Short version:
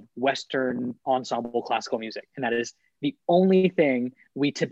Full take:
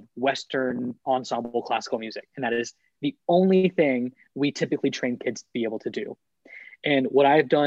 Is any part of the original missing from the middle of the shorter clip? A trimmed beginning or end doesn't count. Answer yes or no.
no